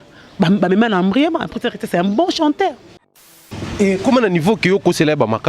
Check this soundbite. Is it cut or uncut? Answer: cut